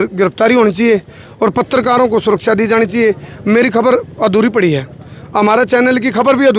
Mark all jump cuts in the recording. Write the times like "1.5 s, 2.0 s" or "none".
none